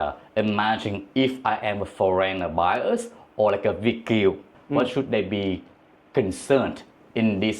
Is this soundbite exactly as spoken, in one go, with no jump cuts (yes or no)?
no